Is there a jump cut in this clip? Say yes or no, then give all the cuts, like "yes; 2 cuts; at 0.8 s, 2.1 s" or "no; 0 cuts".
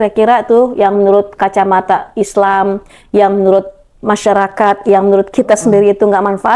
no; 0 cuts